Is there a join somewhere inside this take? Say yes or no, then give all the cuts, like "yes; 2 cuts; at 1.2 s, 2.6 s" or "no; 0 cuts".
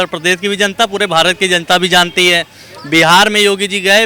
no; 0 cuts